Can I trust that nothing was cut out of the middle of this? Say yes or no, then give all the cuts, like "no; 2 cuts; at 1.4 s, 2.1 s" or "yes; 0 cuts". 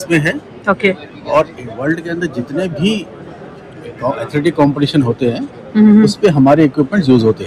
yes; 0 cuts